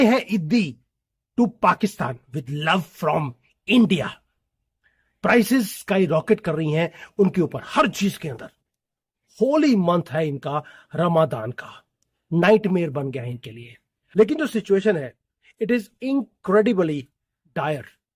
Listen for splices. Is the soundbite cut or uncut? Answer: uncut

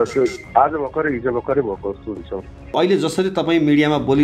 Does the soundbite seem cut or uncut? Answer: cut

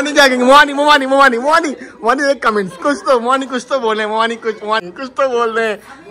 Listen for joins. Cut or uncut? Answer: uncut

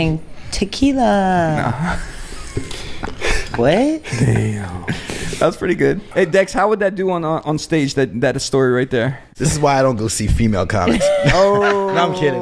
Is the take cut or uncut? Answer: cut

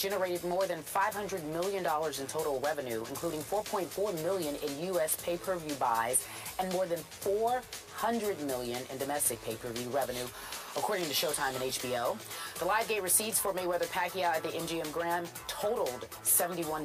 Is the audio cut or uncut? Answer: uncut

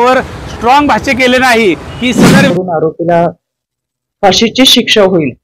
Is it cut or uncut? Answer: cut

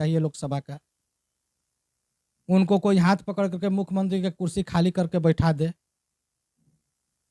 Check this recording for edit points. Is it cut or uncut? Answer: uncut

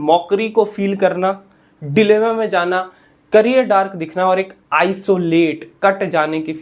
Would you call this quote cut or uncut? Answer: uncut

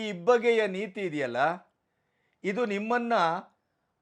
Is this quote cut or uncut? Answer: uncut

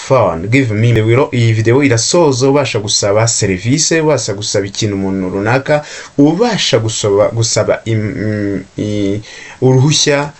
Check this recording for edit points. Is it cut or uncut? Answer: cut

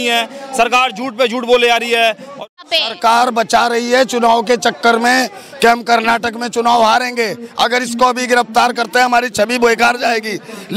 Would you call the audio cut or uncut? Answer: cut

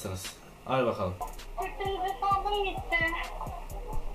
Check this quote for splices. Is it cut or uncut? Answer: cut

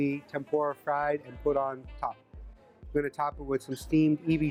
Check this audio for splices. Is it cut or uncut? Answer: uncut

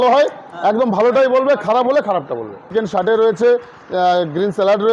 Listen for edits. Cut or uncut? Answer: cut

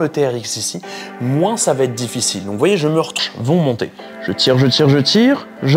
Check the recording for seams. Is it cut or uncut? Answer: cut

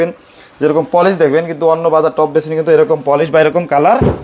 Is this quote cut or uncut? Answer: uncut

